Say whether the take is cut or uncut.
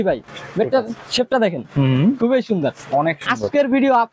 uncut